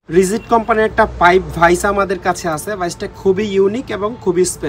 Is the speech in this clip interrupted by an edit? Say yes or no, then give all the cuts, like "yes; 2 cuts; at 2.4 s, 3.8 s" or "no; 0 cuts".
no; 0 cuts